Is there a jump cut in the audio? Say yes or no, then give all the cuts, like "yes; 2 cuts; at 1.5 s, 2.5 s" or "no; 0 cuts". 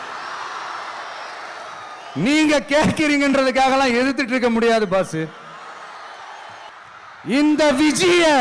yes; 1 cut; at 6.7 s